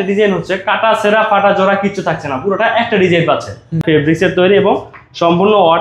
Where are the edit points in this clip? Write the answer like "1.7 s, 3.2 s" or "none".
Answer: 3.8 s